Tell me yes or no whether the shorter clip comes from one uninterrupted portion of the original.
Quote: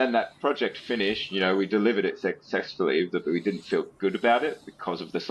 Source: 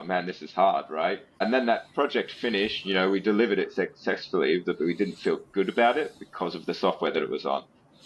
yes